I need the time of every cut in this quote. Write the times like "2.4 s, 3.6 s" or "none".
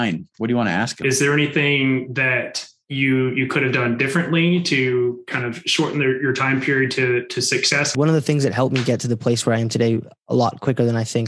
1.0 s, 7.9 s

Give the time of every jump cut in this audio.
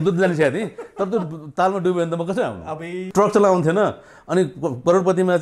3.1 s

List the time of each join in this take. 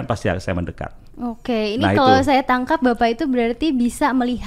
none

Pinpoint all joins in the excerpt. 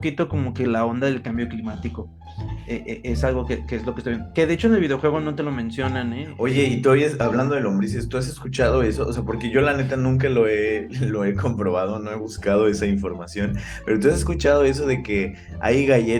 6.3 s

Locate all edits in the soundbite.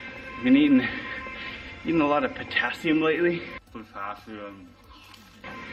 none

